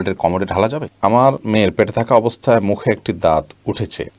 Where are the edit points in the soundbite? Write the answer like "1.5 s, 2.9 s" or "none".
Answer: 0.9 s